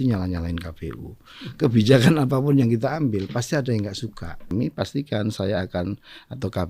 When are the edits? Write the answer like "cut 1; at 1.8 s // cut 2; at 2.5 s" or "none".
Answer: cut 1; at 4.5 s